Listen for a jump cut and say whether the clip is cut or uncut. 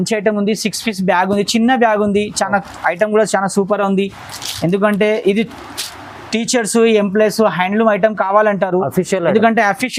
uncut